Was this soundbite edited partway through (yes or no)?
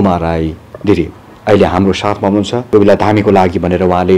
yes